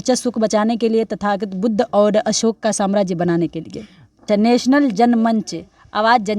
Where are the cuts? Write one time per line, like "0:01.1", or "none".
0:04.3